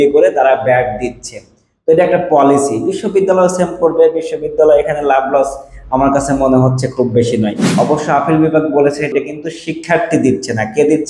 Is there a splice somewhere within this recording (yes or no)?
yes